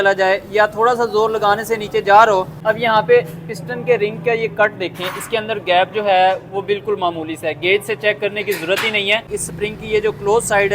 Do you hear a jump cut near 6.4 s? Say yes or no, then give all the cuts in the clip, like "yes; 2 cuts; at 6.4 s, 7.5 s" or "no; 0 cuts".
no; 2 cuts; at 2.5 s, 9.4 s